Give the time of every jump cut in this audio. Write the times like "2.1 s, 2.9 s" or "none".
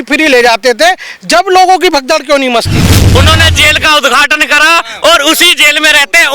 3.2 s